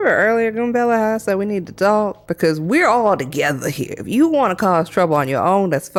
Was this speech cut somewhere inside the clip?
no; 0 cuts

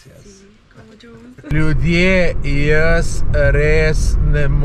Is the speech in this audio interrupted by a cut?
yes; 1 cut; at 1.5 s

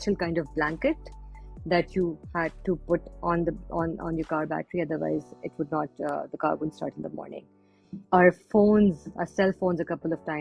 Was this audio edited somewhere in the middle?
no; 0 cuts

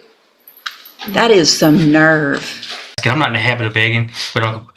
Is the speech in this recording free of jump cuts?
no; 1 cut; at 3.0 s

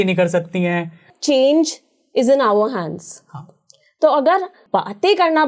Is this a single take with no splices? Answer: no; 2 cuts; at 1.1 s, 4.6 s

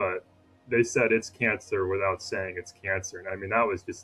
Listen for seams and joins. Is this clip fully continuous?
yes; 0 cuts

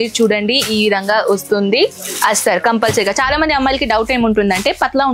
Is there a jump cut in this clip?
no; 0 cuts

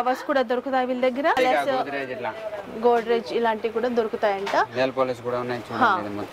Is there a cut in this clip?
yes; 1 cut; at 1.4 s

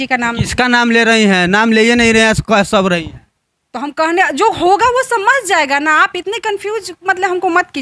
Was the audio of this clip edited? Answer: no; 0 cuts

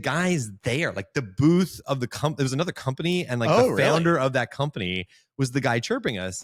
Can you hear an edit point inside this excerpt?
no; 0 cuts

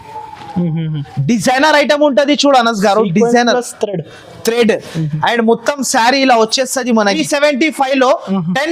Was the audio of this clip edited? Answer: yes; 1 cut; at 7.2 s

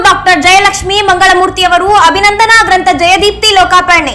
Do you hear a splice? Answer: no; 0 cuts

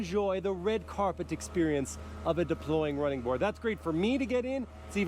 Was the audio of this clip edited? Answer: yes; 1 cut; at 3.2 s

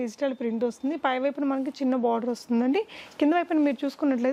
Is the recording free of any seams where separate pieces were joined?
yes; 0 cuts

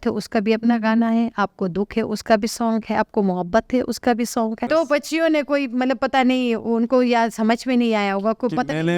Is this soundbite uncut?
no; 1 cut; at 4.6 s

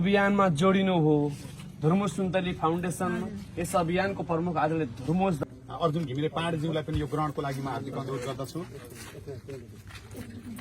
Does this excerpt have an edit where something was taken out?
yes; 1 cut; at 5.4 s

